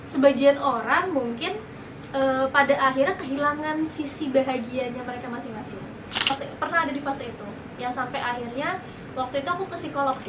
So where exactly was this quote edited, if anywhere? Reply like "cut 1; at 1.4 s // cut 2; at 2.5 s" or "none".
cut 1; at 6.3 s